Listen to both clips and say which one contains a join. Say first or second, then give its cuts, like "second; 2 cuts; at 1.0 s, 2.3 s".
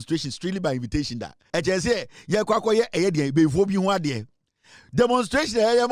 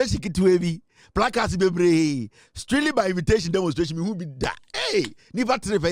first; 1 cut; at 1.3 s